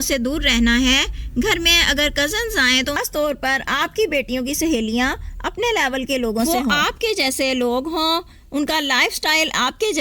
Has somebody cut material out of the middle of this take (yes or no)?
yes